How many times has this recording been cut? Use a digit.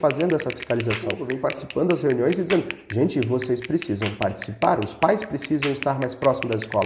1